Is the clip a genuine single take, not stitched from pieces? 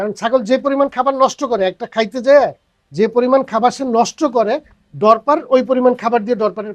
yes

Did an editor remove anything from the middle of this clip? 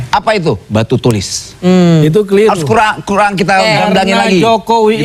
no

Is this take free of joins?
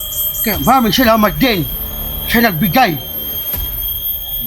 yes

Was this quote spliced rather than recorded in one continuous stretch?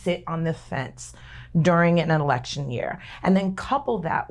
no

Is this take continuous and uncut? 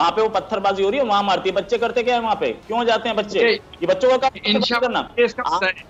yes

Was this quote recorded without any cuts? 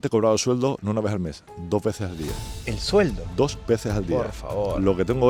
yes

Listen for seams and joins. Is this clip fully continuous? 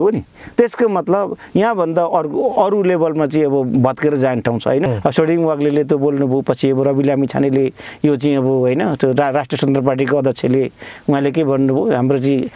no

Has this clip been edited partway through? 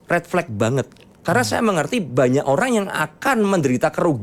no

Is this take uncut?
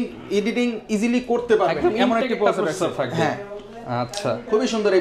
yes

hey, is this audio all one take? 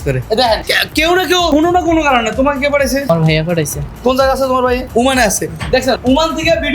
no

